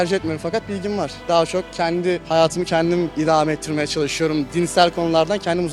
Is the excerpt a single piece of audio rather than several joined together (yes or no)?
yes